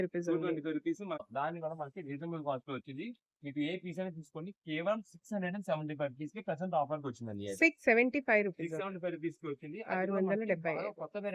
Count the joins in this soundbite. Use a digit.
1